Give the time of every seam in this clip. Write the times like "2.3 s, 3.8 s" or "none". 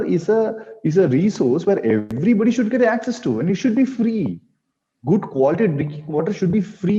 none